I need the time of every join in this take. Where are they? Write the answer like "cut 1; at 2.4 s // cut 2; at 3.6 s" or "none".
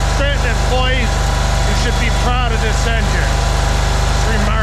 none